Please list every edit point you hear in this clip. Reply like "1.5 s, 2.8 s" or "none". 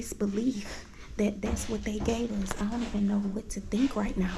none